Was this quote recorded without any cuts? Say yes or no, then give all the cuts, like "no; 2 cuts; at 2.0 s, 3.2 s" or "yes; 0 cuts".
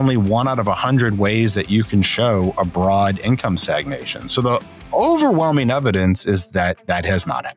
yes; 0 cuts